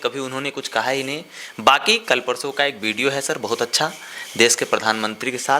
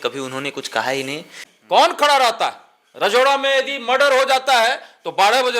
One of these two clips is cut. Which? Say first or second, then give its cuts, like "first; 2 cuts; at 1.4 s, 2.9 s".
second; 1 cut; at 1.4 s